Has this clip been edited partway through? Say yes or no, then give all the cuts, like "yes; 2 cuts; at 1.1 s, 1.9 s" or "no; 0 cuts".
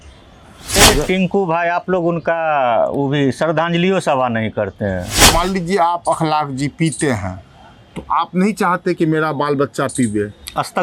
yes; 2 cuts; at 0.8 s, 5.2 s